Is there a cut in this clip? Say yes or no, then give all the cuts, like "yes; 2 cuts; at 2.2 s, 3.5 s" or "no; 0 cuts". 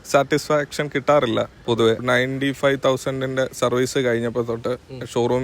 yes; 1 cut; at 2.0 s